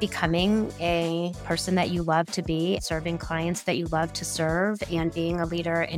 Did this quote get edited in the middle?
yes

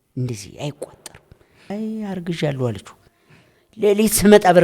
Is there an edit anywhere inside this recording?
yes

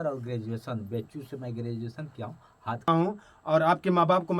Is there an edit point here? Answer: yes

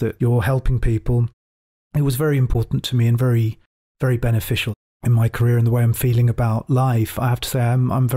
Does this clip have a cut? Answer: yes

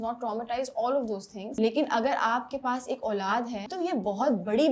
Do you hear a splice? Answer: yes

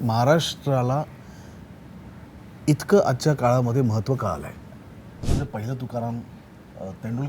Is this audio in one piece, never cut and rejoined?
no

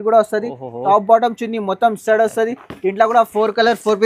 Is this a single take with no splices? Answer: yes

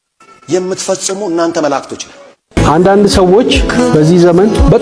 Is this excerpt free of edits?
no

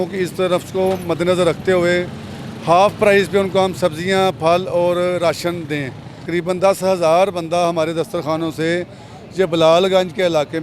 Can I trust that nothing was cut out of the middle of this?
no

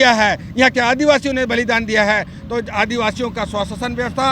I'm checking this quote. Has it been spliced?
no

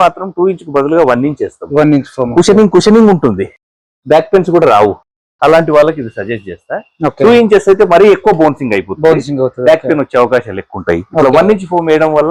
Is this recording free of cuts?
yes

